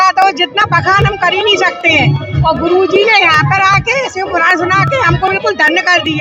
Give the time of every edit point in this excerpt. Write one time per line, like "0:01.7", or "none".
none